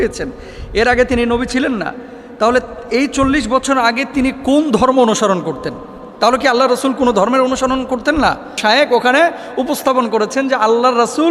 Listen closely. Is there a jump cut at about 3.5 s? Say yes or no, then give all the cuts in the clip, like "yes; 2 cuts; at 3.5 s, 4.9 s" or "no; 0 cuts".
no; 1 cut; at 8.6 s